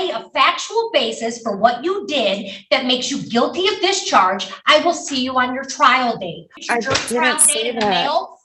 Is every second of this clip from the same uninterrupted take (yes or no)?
no